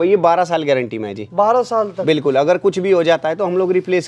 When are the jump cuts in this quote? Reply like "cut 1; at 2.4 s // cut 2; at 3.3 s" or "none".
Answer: none

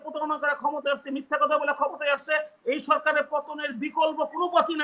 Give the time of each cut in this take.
none

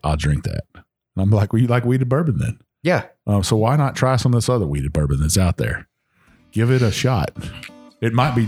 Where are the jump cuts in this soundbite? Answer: none

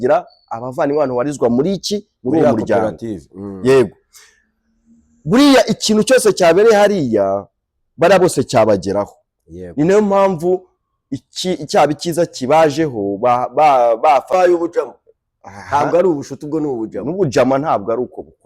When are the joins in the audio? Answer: cut 1; at 14.3 s

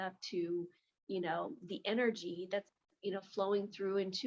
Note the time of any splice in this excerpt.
none

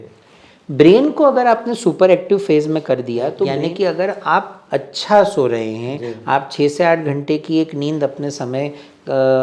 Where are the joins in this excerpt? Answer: cut 1; at 3.5 s

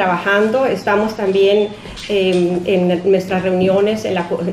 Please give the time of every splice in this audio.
cut 1; at 2.6 s

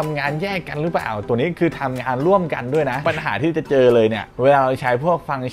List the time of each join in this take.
cut 1; at 3.0 s

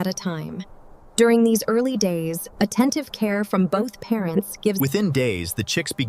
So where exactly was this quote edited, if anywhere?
none

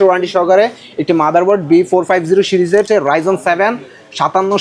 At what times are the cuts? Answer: cut 1; at 2.9 s

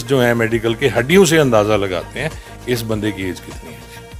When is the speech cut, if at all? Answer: none

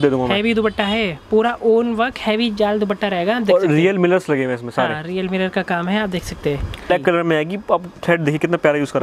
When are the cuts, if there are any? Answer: cut 1; at 6.9 s

